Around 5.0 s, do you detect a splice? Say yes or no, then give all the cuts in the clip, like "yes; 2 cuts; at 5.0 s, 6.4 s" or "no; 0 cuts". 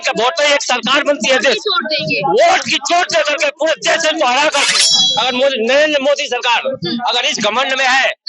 yes; 1 cut; at 5.0 s